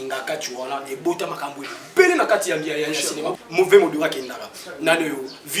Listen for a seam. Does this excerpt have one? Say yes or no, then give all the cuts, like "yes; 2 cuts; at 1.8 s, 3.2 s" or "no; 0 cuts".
yes; 1 cut; at 3.2 s